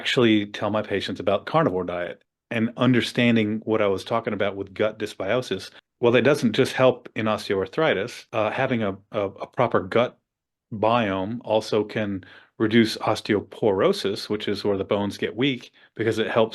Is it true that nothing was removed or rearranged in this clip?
no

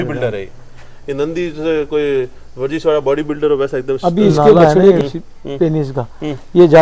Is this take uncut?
no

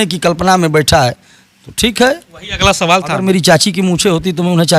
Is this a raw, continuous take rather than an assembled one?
no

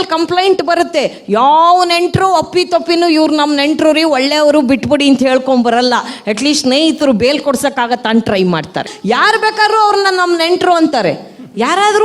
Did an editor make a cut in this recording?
yes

